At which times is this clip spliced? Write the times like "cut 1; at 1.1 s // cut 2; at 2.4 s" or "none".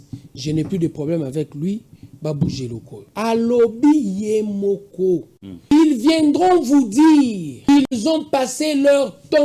cut 1; at 3.0 s // cut 2; at 5.7 s // cut 3; at 7.5 s